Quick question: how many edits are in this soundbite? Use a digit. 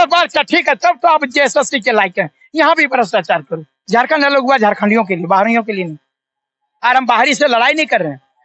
1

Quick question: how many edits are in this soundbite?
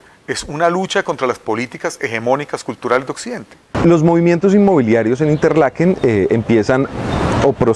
1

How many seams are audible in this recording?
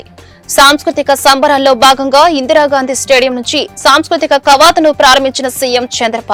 0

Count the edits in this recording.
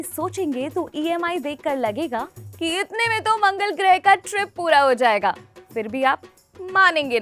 0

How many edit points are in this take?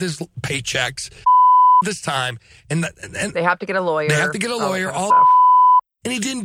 0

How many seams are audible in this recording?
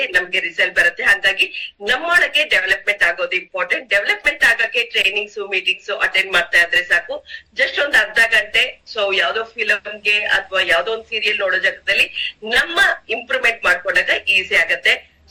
0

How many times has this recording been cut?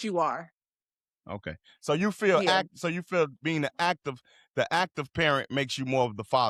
0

